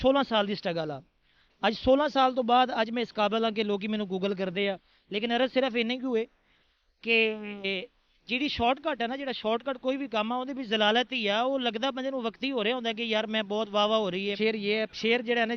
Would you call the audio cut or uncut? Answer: cut